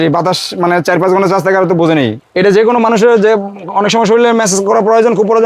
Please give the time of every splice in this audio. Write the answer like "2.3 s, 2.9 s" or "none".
2.2 s